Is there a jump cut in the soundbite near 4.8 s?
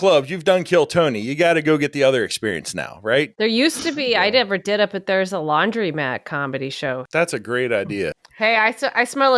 no; 3 cuts; at 3.3 s, 7.0 s, 8.2 s

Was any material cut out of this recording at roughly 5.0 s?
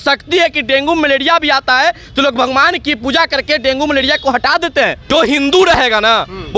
yes; 1 cut; at 5.0 s

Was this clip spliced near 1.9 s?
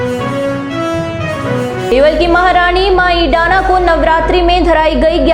yes; 1 cut; at 1.9 s

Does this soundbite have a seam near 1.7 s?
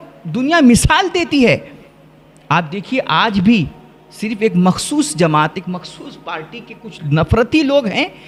no; 0 cuts

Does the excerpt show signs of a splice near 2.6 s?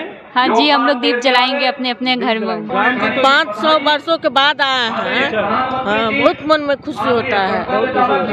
yes; 1 cut; at 2.6 s

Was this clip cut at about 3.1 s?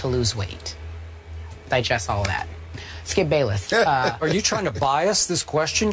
no; 1 cut; at 4.7 s

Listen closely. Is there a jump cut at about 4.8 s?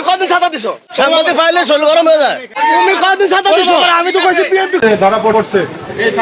yes; 1 cut; at 4.8 s

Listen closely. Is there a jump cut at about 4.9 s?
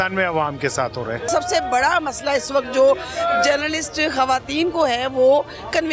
no; 1 cut; at 1.2 s

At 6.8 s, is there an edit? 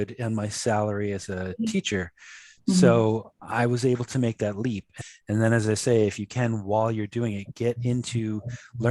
no; 1 cut; at 4.9 s

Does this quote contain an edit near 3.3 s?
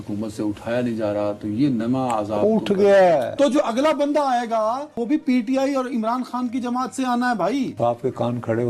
yes; 3 cuts; at 3.3 s, 4.9 s, 7.7 s

